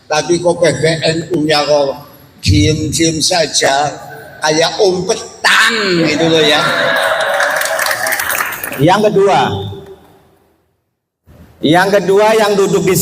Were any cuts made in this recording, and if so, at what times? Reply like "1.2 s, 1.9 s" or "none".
8.2 s